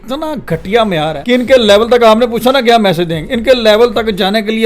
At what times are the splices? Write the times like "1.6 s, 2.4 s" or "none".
1.2 s